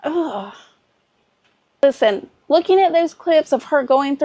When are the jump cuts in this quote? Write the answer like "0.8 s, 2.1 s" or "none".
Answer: 2.0 s